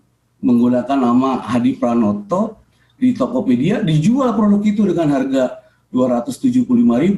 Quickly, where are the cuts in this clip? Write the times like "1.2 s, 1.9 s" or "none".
none